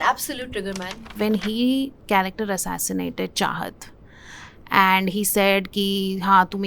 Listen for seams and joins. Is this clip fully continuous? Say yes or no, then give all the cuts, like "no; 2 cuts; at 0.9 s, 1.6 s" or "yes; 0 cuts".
no; 1 cut; at 1.1 s